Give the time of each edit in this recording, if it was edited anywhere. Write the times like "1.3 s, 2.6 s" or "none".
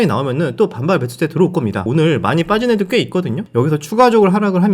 1.8 s, 3.4 s